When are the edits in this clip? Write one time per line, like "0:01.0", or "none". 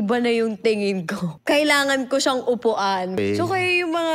0:01.3
0:03.1

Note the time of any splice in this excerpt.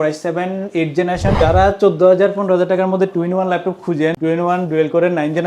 0:01.4
0:04.2

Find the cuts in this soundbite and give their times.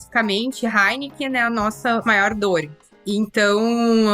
0:02.0
0:02.9

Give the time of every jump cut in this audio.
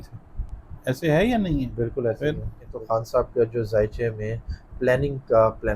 0:02.7

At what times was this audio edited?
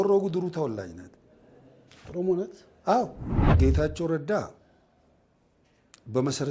0:03.6

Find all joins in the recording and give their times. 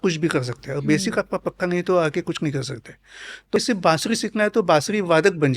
0:03.6

